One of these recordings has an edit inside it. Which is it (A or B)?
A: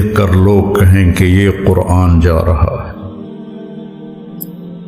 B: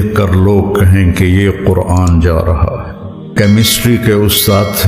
B